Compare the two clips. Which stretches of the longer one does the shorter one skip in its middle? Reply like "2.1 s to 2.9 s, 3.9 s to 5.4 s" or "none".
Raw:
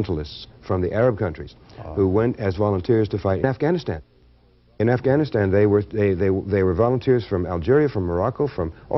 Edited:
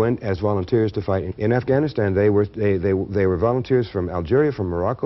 3.4 s to 4.6 s